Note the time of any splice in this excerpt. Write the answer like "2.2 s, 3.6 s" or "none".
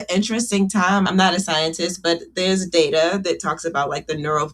1.1 s, 2.3 s

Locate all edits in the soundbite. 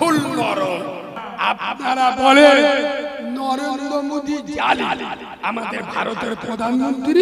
1.2 s

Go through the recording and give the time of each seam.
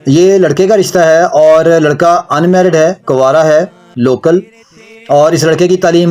3.9 s

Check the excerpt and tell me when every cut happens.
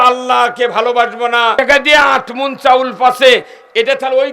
1.5 s

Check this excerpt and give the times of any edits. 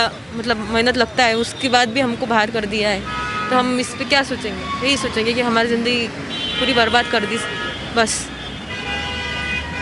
none

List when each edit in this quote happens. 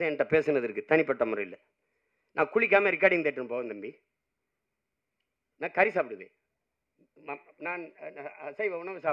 none

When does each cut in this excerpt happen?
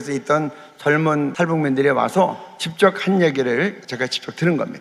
3.8 s

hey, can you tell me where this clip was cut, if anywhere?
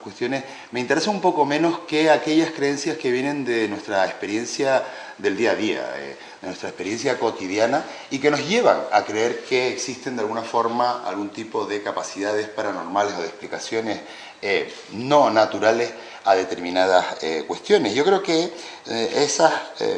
none

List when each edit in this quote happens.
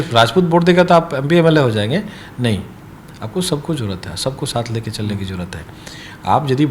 none

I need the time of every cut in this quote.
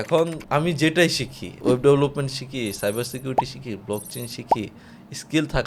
none

